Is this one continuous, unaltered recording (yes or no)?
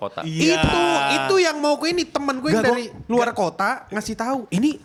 yes